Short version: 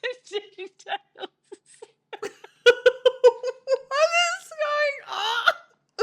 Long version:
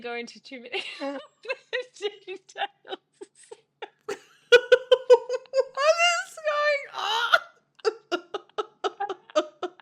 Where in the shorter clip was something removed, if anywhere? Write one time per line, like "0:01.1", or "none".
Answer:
0:02.1